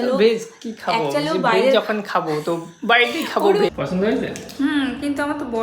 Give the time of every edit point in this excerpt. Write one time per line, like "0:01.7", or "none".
0:03.7